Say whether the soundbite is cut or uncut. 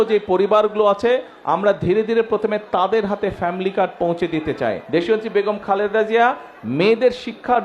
cut